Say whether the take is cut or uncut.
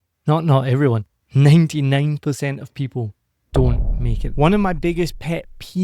cut